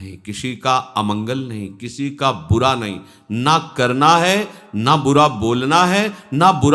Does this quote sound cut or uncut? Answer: uncut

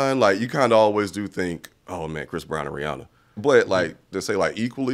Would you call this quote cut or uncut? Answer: cut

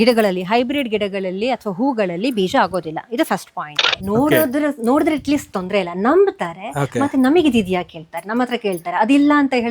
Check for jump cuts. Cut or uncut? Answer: cut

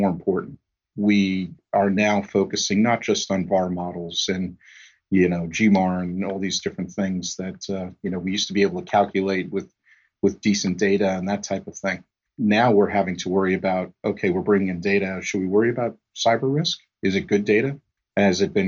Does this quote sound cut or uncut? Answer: uncut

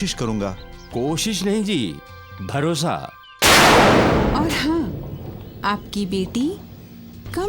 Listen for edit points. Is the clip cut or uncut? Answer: cut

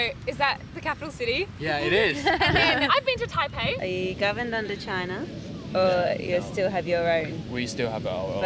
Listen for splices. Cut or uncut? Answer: cut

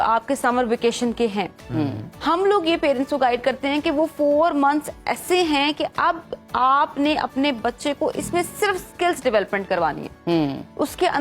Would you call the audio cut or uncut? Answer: uncut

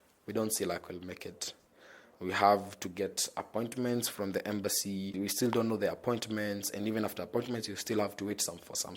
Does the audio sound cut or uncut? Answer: cut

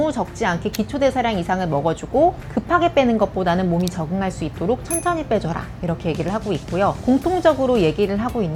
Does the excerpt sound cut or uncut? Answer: uncut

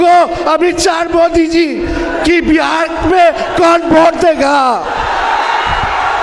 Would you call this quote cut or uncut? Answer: uncut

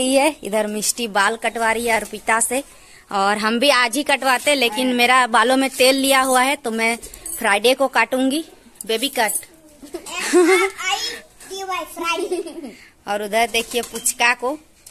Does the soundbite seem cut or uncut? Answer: uncut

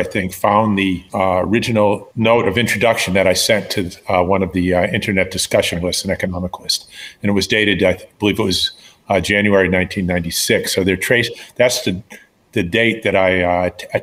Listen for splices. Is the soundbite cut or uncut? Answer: cut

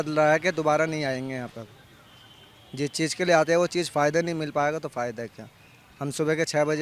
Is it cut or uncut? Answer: uncut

